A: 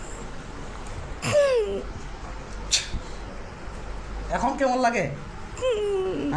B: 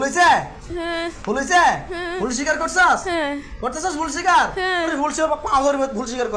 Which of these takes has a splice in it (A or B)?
B